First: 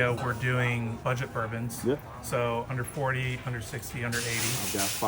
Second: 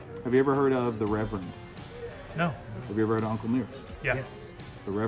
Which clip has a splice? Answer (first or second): first